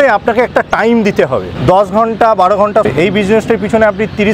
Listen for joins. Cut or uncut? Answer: cut